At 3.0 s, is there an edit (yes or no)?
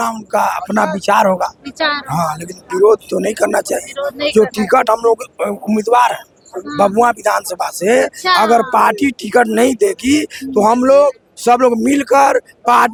no